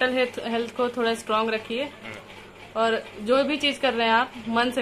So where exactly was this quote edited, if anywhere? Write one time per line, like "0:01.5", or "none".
none